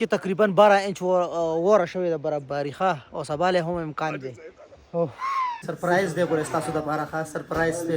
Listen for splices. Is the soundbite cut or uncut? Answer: cut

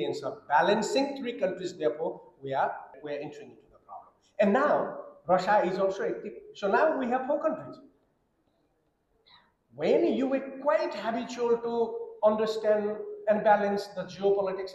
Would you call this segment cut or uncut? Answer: cut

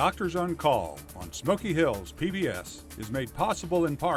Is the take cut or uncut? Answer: uncut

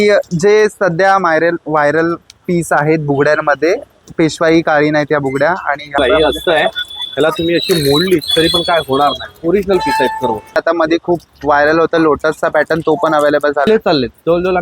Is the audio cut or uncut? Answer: cut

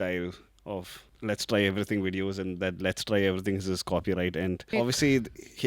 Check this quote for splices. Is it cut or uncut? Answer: cut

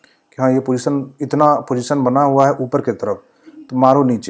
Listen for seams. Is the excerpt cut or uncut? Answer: uncut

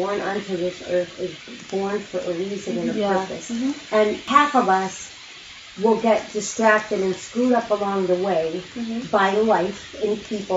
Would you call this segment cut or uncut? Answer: cut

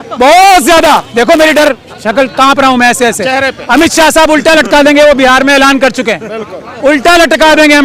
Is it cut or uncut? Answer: uncut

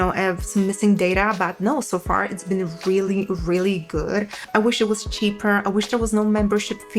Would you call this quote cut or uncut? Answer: cut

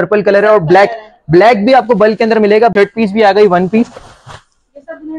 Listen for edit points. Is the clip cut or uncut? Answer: cut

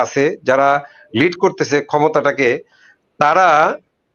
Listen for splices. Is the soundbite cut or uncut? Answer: uncut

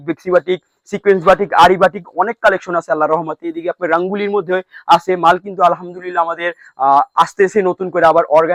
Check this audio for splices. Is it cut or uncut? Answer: uncut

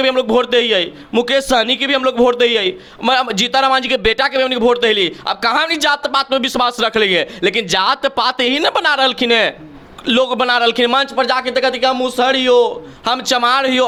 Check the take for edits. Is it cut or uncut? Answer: uncut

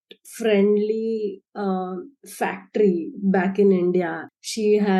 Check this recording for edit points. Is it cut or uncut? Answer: uncut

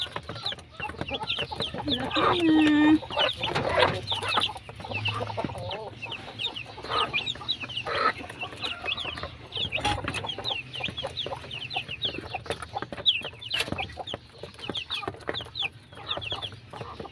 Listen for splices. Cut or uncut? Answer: uncut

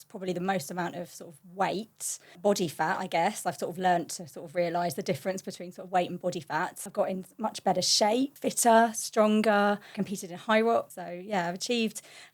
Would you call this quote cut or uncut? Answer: cut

